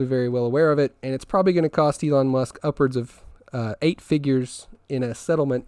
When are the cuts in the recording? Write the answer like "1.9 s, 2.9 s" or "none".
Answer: none